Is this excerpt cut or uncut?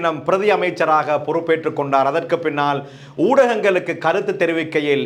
uncut